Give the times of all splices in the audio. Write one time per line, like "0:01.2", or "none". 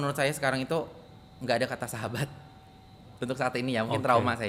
none